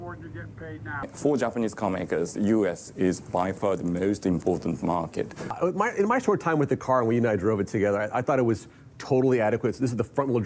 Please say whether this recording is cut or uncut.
cut